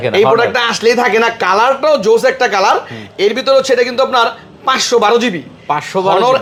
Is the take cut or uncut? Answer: uncut